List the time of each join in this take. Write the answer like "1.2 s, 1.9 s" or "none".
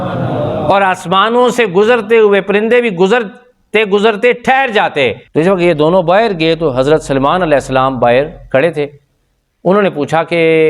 5.2 s